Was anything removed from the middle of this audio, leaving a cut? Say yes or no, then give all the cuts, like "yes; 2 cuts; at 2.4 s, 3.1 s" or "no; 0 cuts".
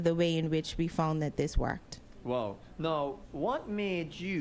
no; 0 cuts